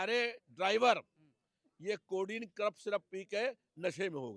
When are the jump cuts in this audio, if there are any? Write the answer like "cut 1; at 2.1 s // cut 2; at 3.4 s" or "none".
none